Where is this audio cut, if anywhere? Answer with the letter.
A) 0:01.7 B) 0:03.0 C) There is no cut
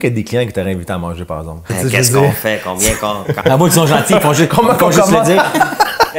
A